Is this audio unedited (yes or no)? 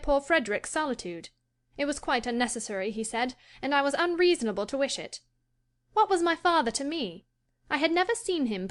yes